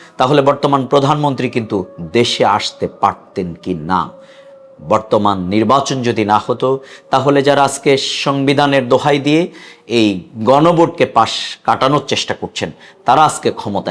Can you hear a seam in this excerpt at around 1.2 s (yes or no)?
no